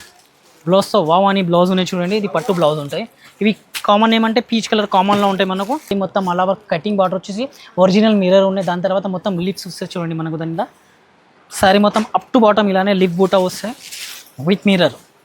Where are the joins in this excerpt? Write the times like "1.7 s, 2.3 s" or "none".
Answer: 5.9 s